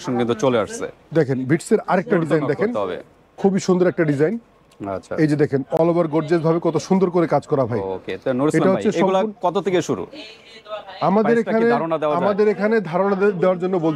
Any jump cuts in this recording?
no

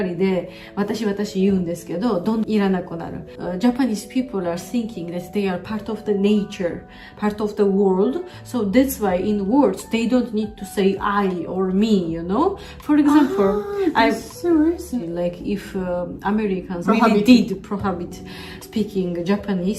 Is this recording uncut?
no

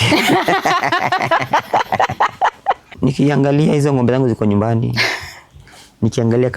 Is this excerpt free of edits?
no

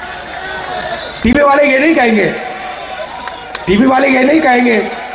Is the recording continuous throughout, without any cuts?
yes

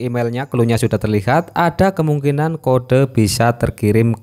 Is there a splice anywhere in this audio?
no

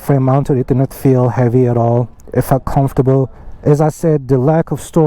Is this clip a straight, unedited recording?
no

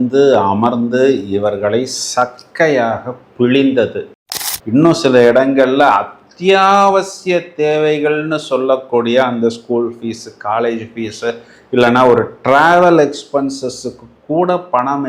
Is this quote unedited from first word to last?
no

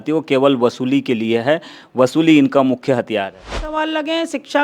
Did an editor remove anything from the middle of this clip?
yes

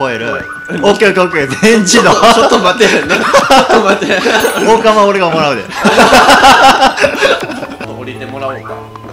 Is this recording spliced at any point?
yes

